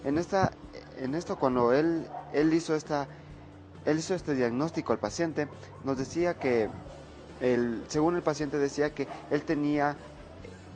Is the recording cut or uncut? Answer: uncut